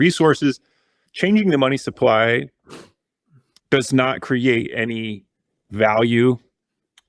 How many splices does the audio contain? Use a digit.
1